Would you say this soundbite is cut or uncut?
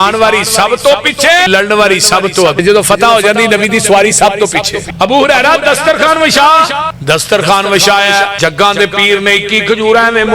cut